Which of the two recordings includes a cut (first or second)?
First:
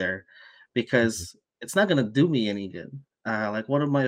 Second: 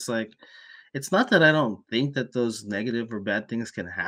first